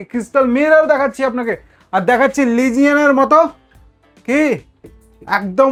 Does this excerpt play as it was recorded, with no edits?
yes; 0 cuts

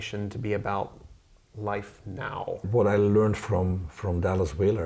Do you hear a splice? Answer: yes; 1 cut; at 2.6 s

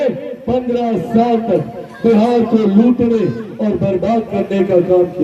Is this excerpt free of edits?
yes; 0 cuts

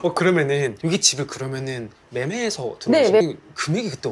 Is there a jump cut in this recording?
yes; 1 cut; at 3.2 s

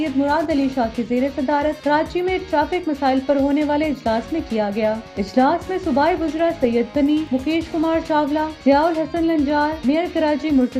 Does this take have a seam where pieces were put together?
no; 0 cuts

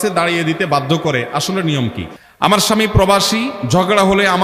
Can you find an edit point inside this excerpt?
yes; 1 cut; at 2.0 s

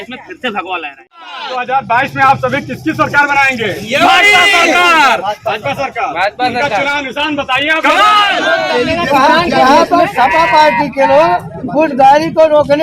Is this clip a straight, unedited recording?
no; 2 cuts; at 1.5 s, 8.6 s

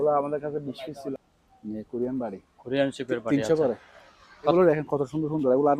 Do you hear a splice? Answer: yes; 2 cuts; at 1.1 s, 4.5 s

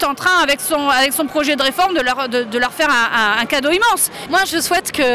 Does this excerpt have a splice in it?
no; 0 cuts

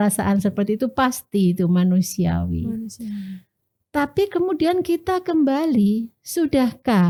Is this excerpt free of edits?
yes; 0 cuts

